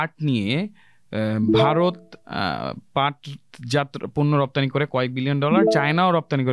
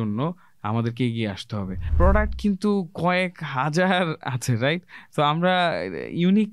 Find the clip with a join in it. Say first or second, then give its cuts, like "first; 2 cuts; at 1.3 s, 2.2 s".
second; 1 cut; at 1.8 s